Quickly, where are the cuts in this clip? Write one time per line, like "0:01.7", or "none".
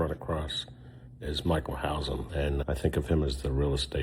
0:02.3